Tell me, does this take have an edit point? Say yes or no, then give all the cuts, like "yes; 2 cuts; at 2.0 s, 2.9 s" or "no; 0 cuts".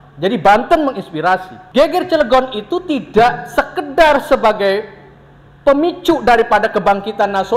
yes; 1 cut; at 1.6 s